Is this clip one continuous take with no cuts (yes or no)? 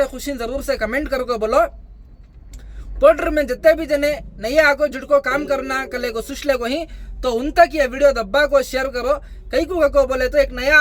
yes